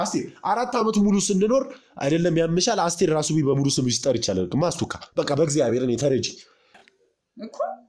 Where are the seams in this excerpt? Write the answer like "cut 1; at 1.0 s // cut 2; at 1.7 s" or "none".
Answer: cut 1; at 6.8 s